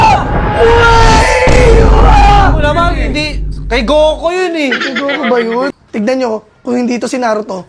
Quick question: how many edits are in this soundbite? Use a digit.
1